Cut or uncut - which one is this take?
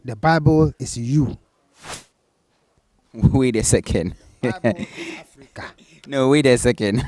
uncut